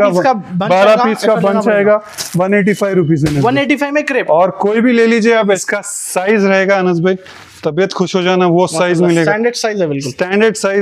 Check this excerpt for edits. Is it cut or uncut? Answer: cut